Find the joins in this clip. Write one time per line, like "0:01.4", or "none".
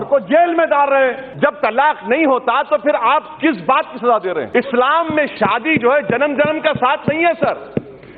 0:01.2
0:04.5